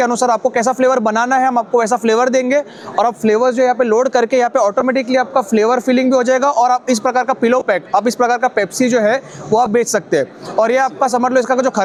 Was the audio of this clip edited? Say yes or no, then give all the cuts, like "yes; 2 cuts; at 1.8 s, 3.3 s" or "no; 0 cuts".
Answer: no; 0 cuts